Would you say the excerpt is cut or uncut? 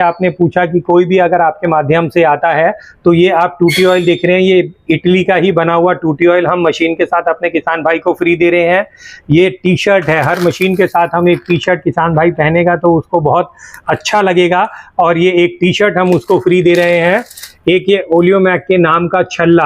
uncut